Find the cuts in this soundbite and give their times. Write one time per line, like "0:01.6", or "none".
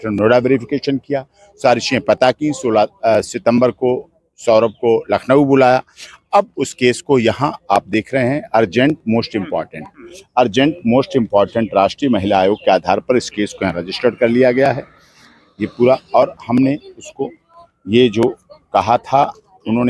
none